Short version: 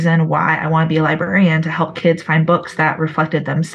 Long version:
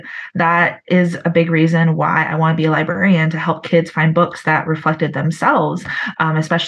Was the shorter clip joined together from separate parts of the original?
no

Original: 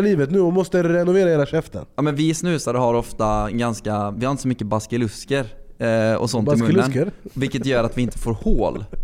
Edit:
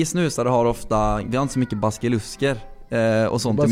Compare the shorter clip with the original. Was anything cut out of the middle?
yes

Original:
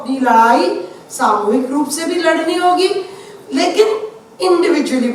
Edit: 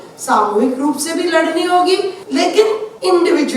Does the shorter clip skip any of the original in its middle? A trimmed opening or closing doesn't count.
yes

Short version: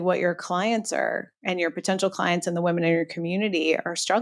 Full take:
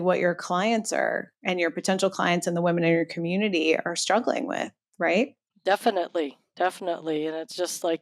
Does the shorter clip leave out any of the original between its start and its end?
no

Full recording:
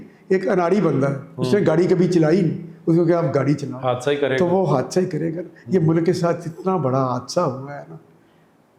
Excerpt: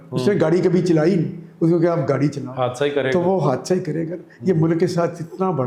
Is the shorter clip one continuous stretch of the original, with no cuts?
yes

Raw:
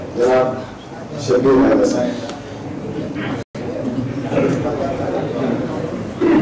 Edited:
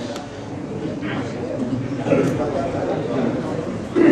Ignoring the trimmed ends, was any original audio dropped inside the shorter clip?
yes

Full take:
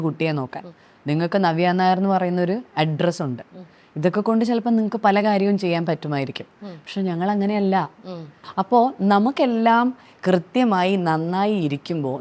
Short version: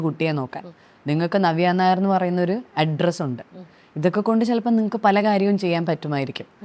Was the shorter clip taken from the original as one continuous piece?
yes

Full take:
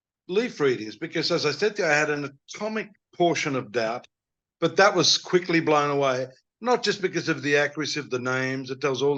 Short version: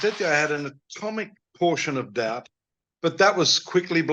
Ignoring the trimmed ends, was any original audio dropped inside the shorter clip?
no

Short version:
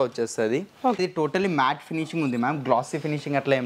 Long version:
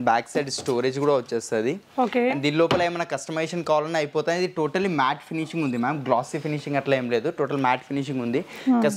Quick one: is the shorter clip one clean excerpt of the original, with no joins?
no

